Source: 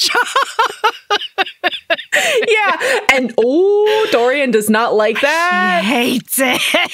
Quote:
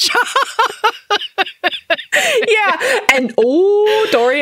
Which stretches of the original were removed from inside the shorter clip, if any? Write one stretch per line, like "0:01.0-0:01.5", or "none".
none